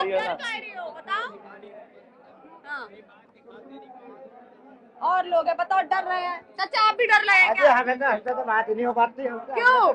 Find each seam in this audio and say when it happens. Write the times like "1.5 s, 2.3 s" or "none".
none